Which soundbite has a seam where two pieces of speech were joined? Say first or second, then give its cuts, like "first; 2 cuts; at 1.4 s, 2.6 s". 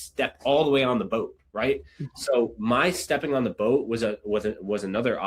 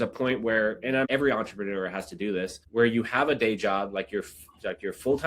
second; 2 cuts; at 1.0 s, 2.6 s